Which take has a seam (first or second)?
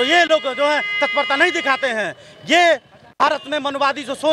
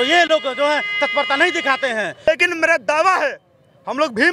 second